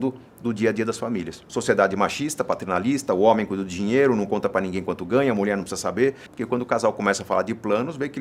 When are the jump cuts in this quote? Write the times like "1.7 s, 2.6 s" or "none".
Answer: 1.4 s, 6.3 s